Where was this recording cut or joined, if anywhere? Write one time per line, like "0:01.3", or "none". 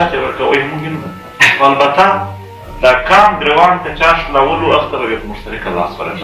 0:01.5